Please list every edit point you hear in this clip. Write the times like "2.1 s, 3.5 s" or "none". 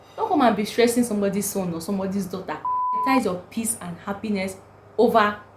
3.0 s